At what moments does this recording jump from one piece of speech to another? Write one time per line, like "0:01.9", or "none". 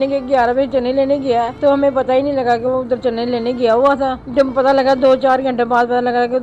0:01.5
0:04.2

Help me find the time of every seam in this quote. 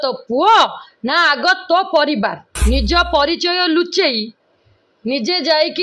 0:02.5

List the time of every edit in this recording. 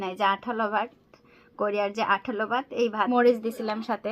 0:03.1

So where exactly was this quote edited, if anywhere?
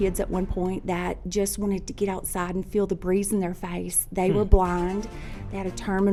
none

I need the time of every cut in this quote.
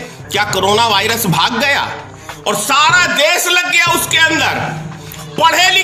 none

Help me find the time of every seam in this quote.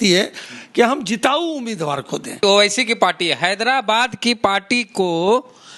0:02.4

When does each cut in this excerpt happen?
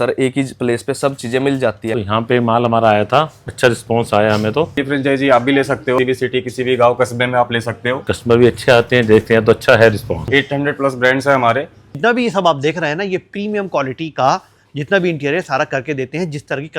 0:01.9
0:03.4
0:04.8
0:06.0
0:08.0
0:10.3
0:11.9

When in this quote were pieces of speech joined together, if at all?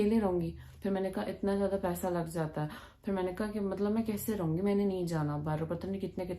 none

